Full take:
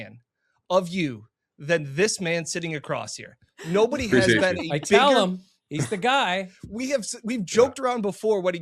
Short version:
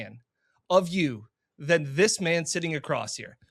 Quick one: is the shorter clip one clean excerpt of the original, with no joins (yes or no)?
yes